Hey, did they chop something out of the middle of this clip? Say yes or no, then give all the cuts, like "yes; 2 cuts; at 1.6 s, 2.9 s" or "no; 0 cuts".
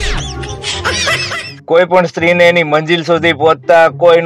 yes; 1 cut; at 1.5 s